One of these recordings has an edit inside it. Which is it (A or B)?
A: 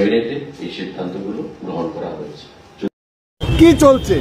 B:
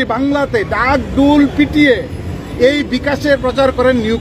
A